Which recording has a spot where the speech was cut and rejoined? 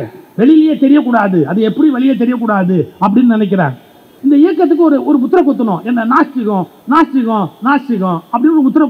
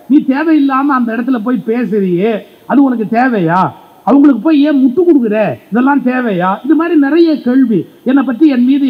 first; 1 cut; at 4.0 s

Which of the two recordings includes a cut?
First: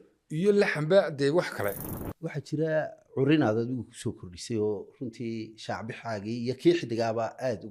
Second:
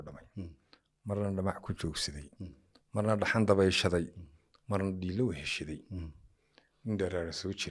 first; 1 cut; at 1.8 s

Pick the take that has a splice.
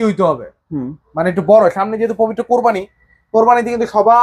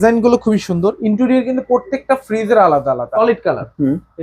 second; 1 cut; at 3.1 s

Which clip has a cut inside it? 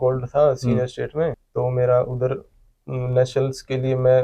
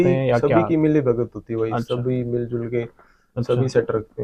first; 1 cut; at 1.4 s

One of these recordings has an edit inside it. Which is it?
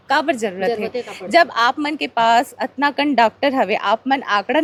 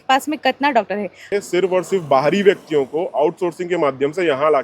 second; 1 cut; at 1.3 s

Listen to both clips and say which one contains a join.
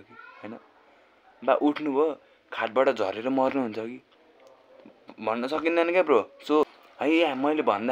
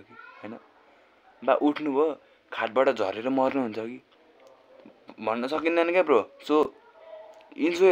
first; 1 cut; at 6.8 s

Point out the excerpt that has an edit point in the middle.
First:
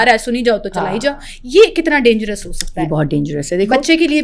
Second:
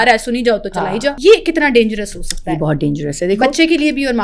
second; 1 cut; at 1.1 s

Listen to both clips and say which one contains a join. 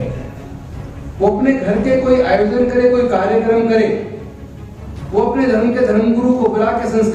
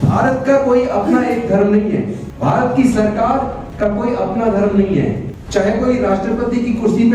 second; 3 cuts; at 2.2 s, 3.6 s, 5.3 s

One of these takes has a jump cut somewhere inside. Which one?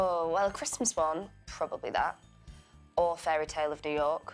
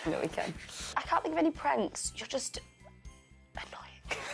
second; 1 cut; at 0.9 s

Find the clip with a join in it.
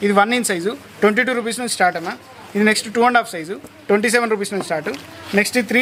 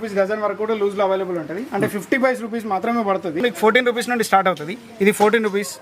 second; 1 cut; at 3.4 s

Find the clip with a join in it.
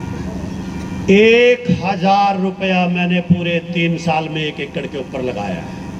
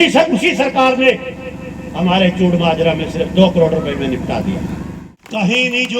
second; 1 cut; at 4.9 s

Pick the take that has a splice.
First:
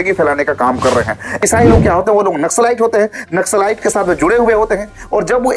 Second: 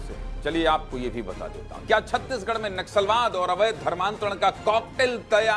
first; 1 cut; at 1.4 s

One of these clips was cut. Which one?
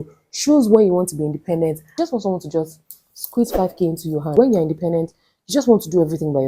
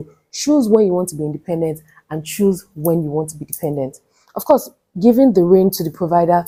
first; 2 cuts; at 1.8 s, 4.3 s

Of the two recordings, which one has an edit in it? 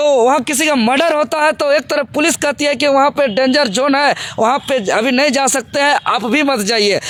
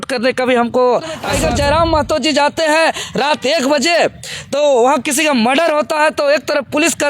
second; 1 cut; at 1.3 s

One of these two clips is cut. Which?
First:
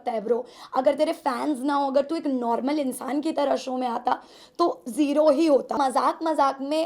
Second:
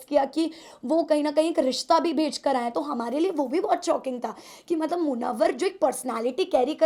first; 1 cut; at 5.7 s

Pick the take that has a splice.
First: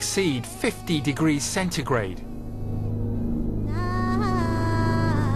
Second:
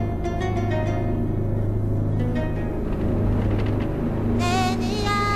first; 1 cut; at 4.1 s

